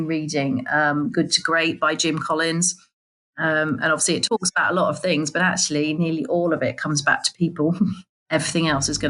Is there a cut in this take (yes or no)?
yes